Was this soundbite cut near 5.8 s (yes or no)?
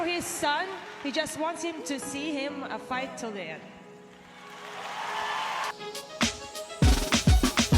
yes